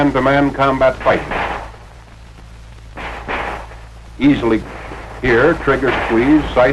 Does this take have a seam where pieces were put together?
no; 0 cuts

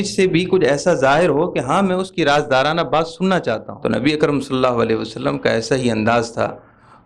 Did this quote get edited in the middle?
yes; 1 cut; at 3.7 s

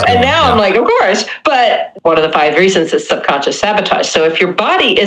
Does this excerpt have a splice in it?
yes; 1 cut; at 1.9 s

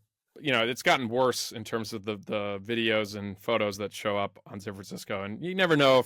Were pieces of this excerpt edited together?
no; 0 cuts

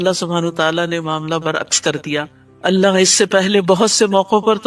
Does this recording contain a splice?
no; 0 cuts

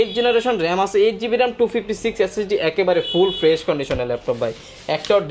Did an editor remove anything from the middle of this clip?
no; 0 cuts

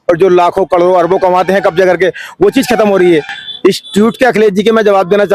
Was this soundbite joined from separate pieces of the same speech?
no; 0 cuts

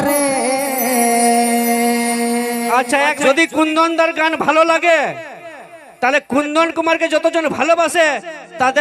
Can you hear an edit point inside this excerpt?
yes; 1 cut; at 3.2 s

